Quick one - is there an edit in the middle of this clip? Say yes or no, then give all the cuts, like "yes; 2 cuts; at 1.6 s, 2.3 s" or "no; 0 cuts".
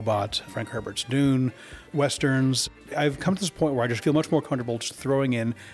yes; 2 cuts; at 2.7 s, 4.0 s